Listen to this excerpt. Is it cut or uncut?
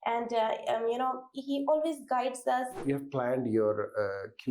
cut